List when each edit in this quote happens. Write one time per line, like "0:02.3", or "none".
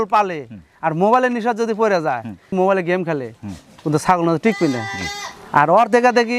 0:02.5